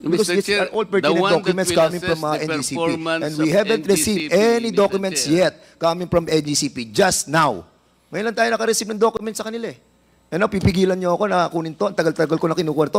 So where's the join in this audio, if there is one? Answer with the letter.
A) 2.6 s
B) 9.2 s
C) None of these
C